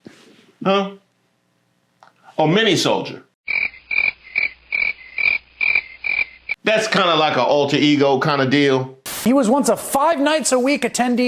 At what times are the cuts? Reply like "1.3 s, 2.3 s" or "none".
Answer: 9.2 s